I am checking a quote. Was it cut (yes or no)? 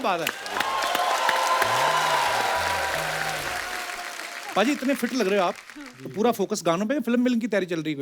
no